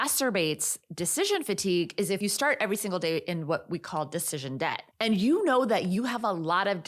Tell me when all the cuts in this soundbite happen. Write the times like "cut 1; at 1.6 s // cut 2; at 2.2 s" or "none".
cut 1; at 4.9 s